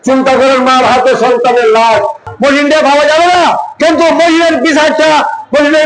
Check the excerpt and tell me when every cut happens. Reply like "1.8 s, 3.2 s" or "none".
2.2 s